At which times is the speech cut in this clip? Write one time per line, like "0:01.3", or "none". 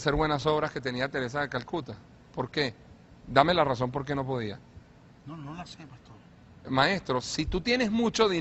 none